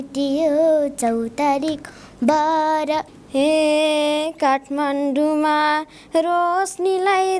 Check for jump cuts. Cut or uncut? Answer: cut